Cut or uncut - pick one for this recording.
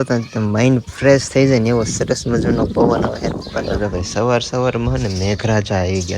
cut